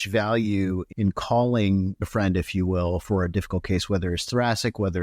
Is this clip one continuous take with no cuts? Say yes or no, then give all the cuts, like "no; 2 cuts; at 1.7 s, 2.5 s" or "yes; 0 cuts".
no; 3 cuts; at 0.9 s, 2.0 s, 3.0 s